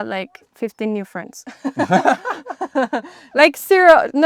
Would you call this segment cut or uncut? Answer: uncut